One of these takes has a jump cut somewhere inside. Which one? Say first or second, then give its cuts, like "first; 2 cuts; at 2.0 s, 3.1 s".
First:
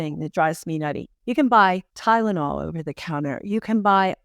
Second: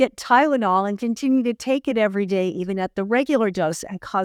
first; 2 cuts; at 1.1 s, 1.9 s